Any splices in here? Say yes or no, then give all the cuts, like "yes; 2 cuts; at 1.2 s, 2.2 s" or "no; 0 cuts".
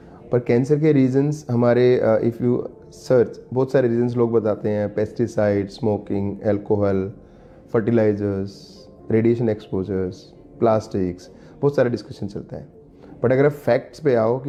no; 0 cuts